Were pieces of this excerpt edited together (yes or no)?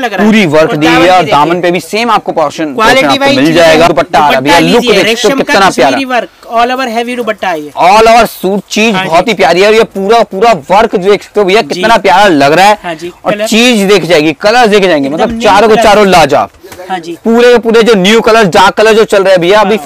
yes